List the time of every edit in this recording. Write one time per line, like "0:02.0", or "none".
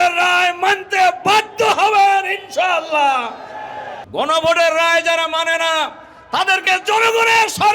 0:03.9